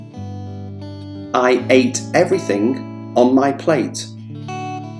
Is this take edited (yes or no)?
yes